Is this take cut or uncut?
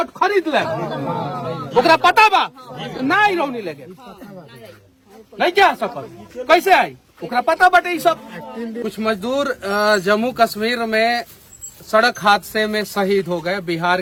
uncut